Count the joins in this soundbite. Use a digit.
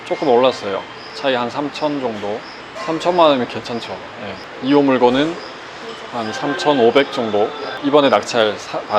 2